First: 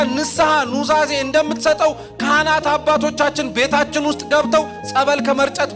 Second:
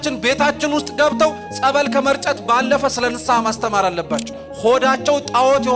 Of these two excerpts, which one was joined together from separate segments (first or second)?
second